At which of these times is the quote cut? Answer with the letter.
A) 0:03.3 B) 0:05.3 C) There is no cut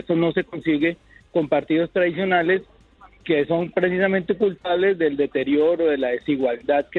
C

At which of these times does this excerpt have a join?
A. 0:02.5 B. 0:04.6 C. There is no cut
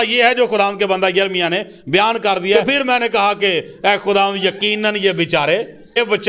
A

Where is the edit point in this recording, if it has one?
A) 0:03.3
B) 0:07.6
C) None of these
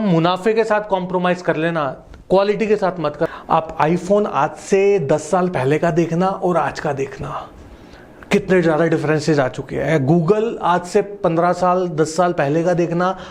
A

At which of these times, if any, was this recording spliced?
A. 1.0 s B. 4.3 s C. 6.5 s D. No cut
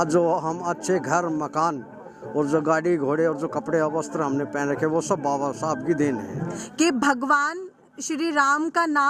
C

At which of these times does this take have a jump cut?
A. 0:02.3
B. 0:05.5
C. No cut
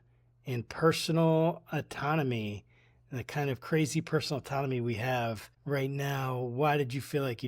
B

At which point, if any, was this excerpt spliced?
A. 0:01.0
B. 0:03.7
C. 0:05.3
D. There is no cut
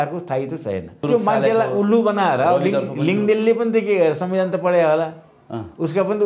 A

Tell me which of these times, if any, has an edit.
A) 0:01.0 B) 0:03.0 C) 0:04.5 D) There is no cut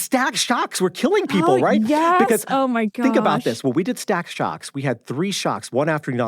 B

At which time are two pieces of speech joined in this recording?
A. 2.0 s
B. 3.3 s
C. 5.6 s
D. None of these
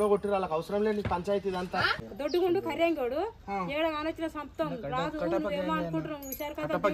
A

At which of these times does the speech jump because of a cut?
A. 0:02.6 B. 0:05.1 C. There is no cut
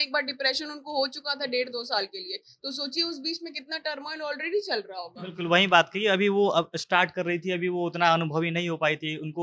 C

